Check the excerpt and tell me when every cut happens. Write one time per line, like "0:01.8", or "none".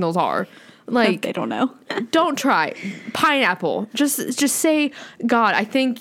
none